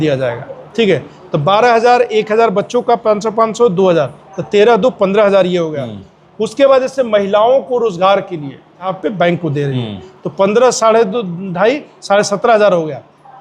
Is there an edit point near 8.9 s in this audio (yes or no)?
yes